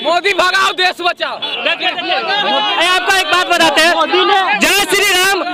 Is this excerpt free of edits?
yes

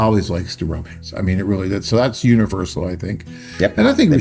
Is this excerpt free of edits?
yes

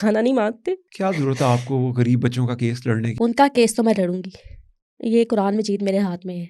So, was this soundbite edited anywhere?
yes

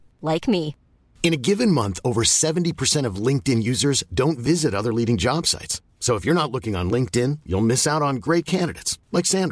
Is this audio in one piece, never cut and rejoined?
yes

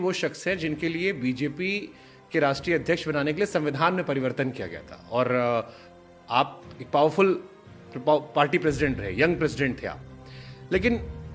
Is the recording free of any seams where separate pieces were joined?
yes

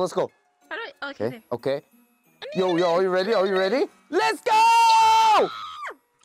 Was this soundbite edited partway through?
no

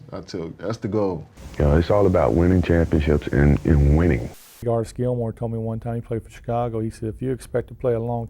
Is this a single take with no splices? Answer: no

